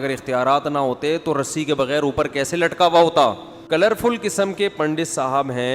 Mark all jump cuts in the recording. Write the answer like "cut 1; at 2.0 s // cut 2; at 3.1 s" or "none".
cut 1; at 3.5 s

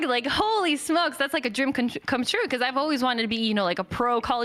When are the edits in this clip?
none

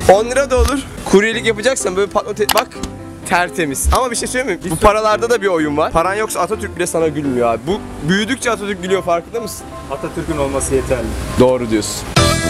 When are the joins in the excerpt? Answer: cut 1; at 0.9 s

